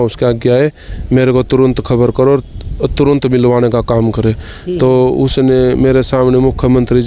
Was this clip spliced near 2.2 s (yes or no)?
no